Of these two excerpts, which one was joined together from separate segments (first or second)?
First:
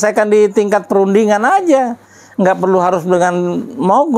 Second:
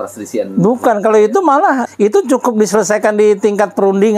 second